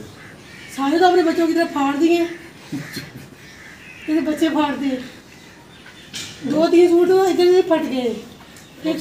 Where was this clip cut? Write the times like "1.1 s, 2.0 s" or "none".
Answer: none